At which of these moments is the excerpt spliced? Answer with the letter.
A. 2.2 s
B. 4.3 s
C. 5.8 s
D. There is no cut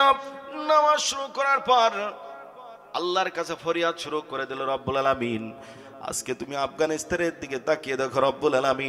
D